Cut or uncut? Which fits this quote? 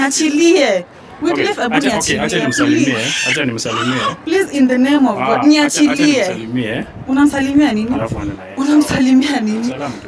uncut